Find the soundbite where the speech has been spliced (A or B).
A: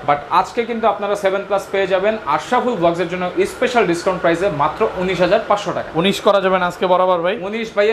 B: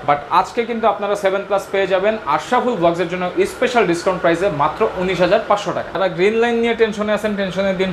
B